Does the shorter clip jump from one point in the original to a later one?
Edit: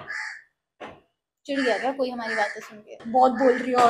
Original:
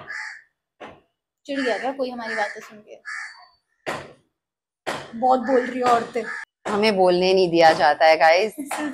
yes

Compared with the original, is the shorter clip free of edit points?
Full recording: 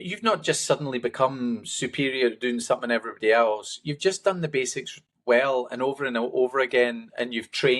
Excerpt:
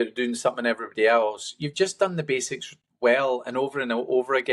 yes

